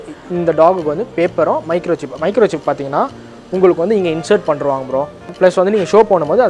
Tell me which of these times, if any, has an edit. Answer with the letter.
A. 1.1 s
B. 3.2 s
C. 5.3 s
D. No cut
C